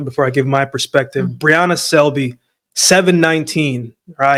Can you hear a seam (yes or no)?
no